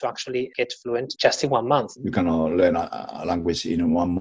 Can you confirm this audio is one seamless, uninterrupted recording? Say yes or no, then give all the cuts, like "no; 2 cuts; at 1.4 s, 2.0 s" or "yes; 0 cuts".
no; 2 cuts; at 0.9 s, 1.9 s